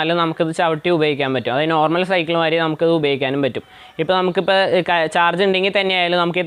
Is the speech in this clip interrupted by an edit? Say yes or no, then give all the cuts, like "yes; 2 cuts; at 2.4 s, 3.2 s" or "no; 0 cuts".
no; 0 cuts